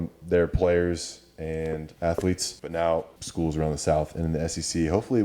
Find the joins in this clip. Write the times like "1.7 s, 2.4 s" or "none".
1.9 s, 2.5 s, 3.2 s